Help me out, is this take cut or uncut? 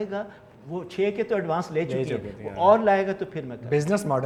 uncut